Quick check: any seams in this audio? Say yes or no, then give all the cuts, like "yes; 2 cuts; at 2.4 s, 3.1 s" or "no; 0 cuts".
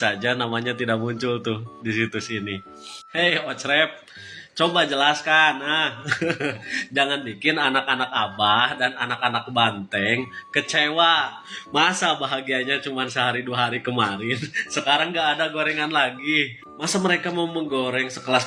no; 0 cuts